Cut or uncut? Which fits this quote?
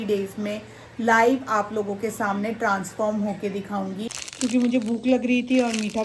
cut